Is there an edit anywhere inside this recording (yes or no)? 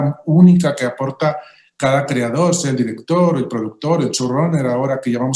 no